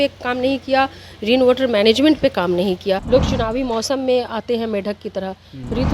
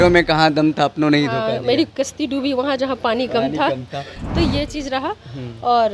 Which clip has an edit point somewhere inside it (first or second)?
first